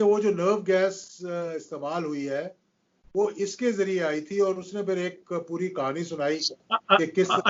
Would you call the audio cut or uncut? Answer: uncut